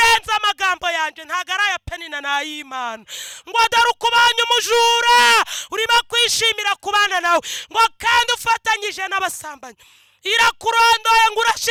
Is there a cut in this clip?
no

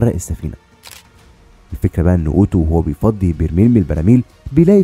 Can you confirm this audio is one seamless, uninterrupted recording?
no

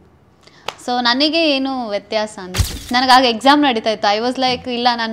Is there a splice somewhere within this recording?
yes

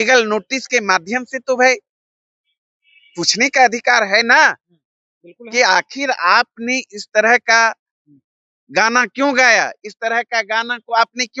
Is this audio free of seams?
yes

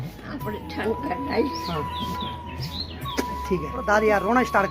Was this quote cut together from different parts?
yes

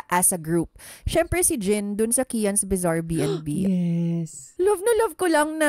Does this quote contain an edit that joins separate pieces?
yes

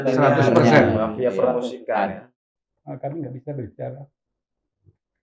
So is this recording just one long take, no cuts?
no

